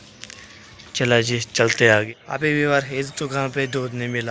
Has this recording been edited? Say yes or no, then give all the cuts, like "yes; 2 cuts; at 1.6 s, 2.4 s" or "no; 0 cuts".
yes; 1 cut; at 2.0 s